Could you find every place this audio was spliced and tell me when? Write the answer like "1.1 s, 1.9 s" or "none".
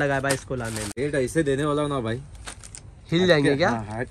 0.9 s